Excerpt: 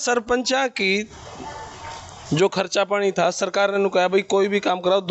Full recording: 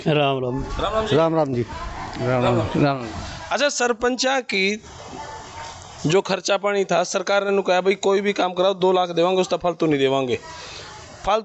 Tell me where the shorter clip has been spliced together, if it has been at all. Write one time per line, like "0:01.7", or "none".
none